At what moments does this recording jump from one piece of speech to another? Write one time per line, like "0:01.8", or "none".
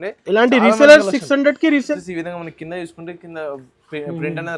0:02.0